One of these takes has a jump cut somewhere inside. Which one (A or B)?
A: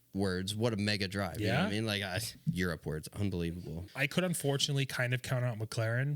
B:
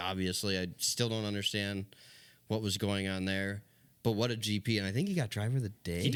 A